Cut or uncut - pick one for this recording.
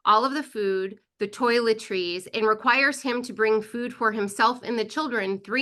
uncut